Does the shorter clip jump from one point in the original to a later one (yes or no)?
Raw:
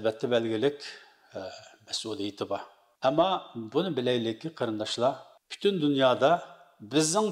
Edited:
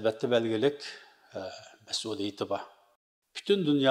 yes